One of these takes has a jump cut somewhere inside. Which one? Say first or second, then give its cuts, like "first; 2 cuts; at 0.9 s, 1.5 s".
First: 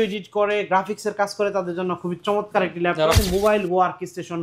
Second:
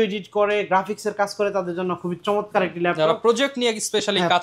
first; 1 cut; at 3.2 s